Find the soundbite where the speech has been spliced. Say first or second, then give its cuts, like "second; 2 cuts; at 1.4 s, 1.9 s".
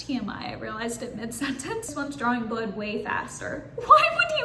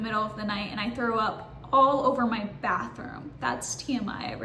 first; 1 cut; at 1.9 s